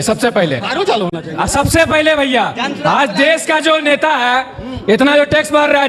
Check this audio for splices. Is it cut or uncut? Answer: uncut